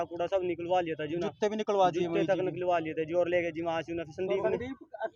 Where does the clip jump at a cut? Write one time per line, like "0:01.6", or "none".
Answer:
none